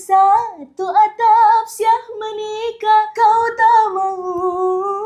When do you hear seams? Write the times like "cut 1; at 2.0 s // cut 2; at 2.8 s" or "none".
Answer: none